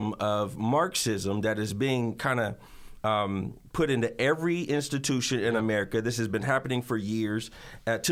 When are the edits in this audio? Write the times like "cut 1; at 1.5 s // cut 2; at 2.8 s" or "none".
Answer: none